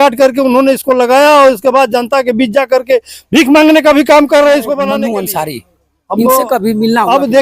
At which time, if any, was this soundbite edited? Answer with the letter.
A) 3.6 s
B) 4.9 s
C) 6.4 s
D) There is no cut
B